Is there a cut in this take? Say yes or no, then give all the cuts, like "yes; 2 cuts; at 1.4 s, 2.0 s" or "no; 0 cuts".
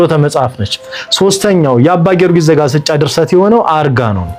yes; 1 cut; at 2.9 s